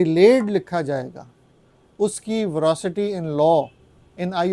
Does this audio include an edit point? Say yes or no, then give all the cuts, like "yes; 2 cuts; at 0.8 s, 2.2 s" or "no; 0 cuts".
no; 0 cuts